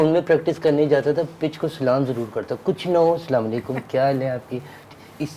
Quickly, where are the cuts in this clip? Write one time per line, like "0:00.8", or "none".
none